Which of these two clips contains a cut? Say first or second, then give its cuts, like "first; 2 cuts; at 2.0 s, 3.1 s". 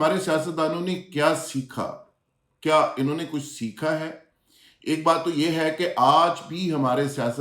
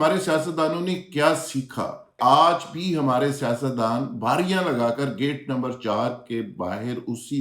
second; 1 cut; at 2.2 s